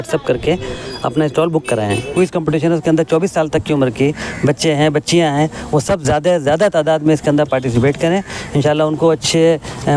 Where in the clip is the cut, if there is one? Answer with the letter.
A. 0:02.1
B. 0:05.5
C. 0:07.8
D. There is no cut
A